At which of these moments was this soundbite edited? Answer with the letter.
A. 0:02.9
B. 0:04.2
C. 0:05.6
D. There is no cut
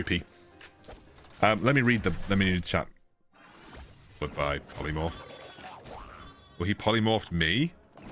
B